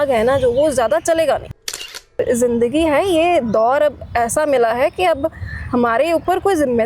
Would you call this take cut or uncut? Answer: cut